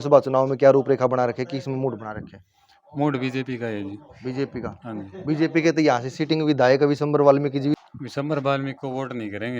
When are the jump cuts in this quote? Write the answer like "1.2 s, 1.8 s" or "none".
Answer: 7.8 s